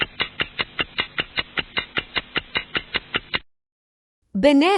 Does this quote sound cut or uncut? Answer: cut